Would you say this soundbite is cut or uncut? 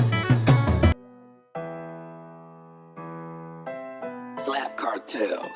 cut